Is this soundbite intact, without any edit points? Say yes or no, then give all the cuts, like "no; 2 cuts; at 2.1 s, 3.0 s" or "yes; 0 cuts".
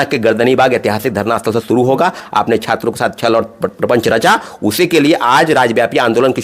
no; 1 cut; at 2.2 s